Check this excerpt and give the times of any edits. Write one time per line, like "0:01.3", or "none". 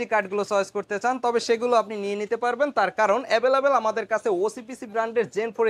none